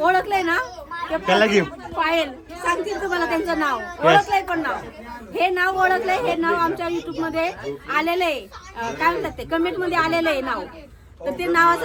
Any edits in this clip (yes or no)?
no